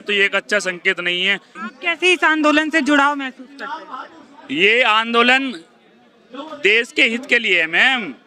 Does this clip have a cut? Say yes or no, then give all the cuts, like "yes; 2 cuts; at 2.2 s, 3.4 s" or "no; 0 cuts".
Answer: yes; 1 cut; at 1.6 s